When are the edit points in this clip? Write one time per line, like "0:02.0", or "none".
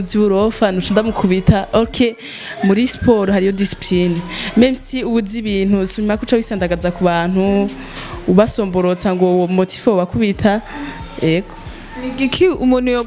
none